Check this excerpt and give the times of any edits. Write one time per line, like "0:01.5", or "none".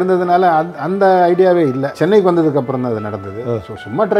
0:01.9